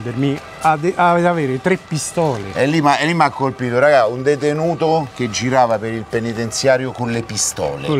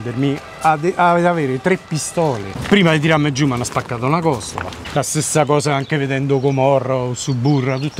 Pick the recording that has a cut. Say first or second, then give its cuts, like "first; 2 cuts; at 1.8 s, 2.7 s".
second; 2 cuts; at 2.4 s, 4.8 s